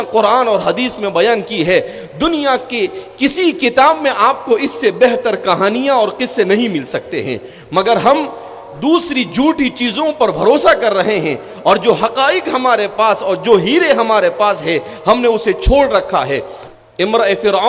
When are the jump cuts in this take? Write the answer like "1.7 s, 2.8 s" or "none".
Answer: 16.6 s

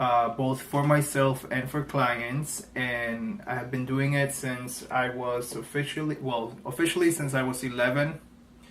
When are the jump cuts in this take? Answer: 5.8 s

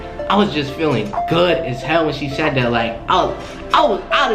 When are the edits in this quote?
none

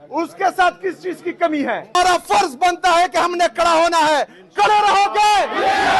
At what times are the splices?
1.9 s

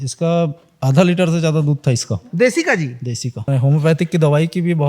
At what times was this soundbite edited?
3.5 s

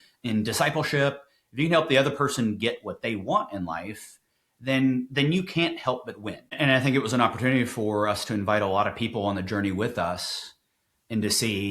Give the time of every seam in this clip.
6.4 s

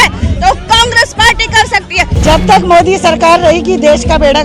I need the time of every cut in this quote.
2.1 s

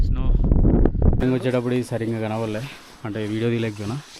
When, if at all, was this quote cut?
1.2 s

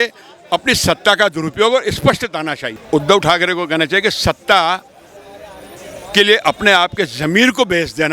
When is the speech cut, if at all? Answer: 2.7 s

